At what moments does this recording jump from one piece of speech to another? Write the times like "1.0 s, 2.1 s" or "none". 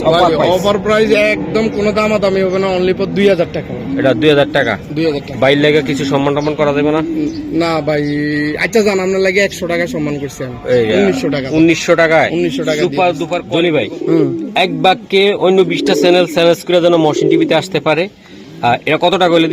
13.4 s